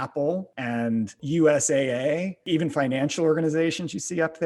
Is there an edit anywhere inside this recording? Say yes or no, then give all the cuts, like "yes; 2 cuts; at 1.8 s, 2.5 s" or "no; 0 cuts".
yes; 2 cuts; at 1.1 s, 2.4 s